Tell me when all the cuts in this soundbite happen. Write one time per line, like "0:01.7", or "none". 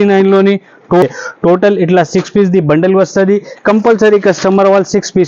0:01.0